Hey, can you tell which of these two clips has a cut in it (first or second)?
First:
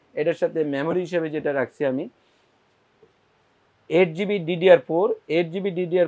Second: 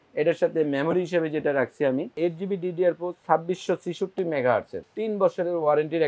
second